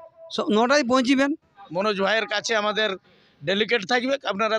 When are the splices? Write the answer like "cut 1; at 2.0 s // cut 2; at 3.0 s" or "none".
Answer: cut 1; at 1.6 s